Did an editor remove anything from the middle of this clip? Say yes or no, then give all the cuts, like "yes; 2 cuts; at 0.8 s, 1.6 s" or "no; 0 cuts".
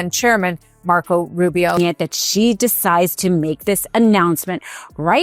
yes; 1 cut; at 1.8 s